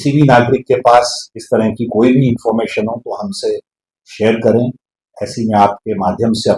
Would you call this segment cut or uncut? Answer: uncut